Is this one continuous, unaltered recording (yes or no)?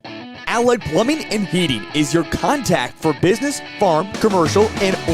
no